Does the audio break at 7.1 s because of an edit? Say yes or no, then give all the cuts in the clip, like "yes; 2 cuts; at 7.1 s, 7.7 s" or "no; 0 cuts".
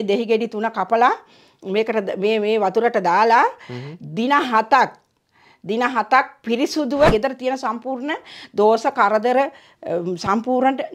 yes; 1 cut; at 7.1 s